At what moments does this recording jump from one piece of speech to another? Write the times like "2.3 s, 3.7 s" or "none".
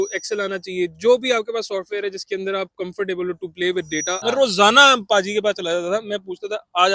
4.1 s